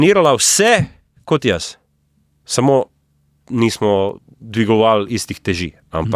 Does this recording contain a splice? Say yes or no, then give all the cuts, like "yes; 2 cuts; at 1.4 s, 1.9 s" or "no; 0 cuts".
no; 0 cuts